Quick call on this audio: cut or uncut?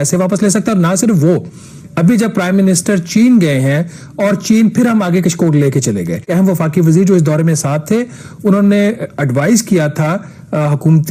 uncut